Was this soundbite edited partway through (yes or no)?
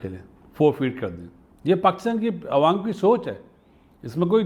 no